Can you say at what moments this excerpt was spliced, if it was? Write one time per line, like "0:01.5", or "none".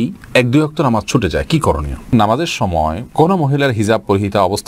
0:02.1